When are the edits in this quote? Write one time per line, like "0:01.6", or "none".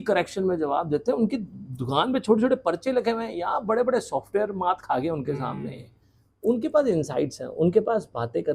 none